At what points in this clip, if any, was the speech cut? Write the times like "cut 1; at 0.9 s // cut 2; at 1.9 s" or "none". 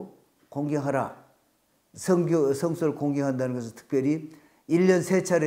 none